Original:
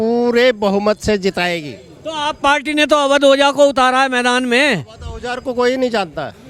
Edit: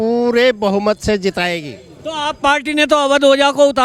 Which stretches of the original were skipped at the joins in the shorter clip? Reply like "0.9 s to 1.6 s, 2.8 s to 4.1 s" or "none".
none